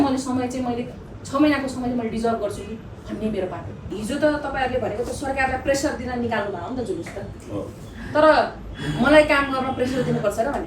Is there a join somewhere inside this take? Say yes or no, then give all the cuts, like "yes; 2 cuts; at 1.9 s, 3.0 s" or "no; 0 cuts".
yes; 1 cut; at 4.0 s